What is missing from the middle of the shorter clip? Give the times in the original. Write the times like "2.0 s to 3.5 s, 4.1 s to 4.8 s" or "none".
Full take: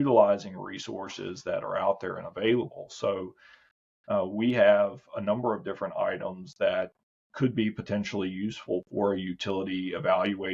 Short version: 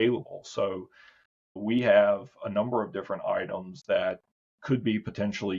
4.0 s to 4.3 s